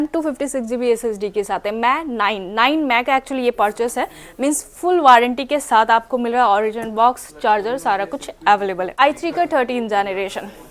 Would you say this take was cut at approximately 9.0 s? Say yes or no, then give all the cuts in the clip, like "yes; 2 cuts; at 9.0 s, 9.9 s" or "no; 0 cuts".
yes; 1 cut; at 9.0 s